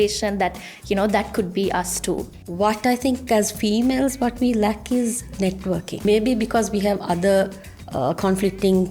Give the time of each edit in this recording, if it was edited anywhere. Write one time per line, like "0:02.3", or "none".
0:02.4
0:06.0